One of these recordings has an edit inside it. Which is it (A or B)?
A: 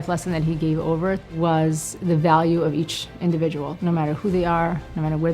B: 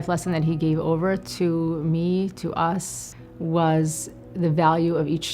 A